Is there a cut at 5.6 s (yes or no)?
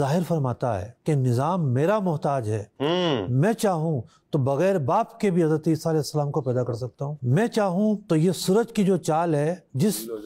no